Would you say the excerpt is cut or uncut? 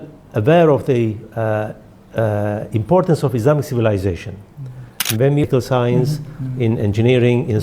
cut